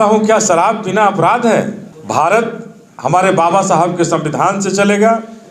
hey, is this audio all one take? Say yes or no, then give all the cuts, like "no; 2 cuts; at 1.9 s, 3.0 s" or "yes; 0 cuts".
no; 1 cut; at 1.9 s